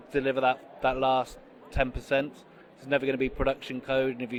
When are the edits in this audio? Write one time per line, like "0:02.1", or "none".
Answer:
none